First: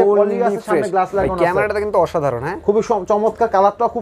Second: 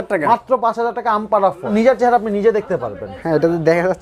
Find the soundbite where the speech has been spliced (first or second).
second